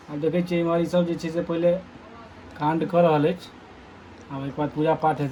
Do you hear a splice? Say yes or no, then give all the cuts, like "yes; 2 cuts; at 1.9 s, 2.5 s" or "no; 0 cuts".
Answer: no; 0 cuts